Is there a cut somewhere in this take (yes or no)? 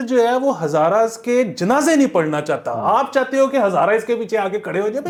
no